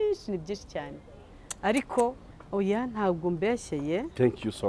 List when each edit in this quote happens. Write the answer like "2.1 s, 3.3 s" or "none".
2.4 s